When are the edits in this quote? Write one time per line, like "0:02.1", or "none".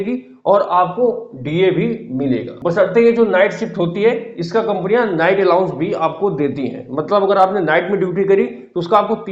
0:02.6